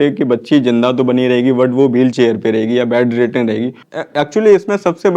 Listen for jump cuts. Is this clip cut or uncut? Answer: cut